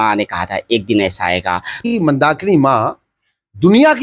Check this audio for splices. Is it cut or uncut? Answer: cut